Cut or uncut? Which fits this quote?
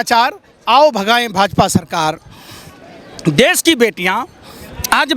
uncut